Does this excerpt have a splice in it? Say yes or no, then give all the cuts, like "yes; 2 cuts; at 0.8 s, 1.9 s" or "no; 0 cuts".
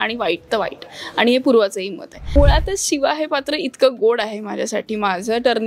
yes; 1 cut; at 2.3 s